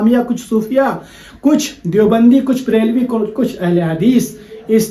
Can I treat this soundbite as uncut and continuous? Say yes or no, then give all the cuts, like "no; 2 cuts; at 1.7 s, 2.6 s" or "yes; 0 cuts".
yes; 0 cuts